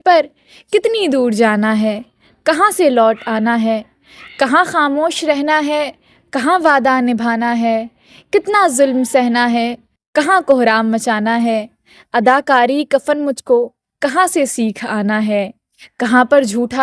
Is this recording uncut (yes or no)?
yes